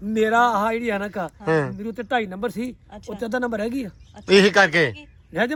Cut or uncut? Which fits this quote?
uncut